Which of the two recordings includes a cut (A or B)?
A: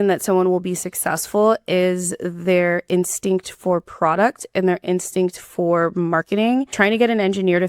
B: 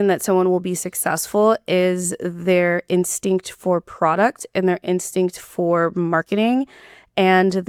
A